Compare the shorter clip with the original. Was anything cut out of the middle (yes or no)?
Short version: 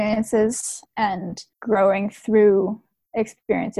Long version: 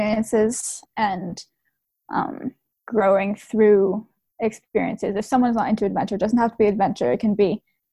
yes